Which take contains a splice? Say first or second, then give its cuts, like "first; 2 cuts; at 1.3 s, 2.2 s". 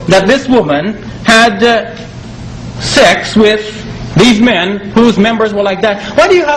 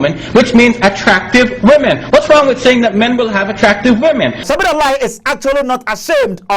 second; 1 cut; at 4.4 s